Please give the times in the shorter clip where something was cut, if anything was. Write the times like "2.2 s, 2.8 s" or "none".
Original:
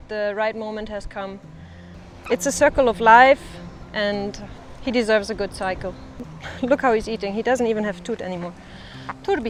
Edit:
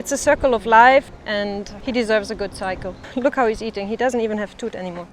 1.5 s, 3.0 s